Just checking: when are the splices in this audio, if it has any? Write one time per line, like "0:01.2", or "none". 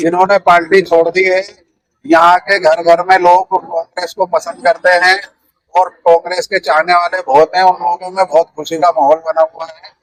none